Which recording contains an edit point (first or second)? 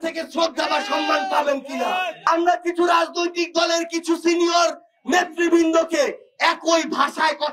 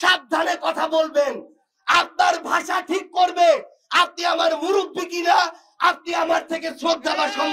first